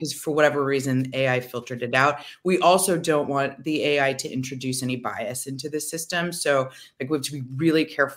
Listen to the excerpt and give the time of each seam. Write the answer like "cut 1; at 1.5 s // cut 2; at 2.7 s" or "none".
none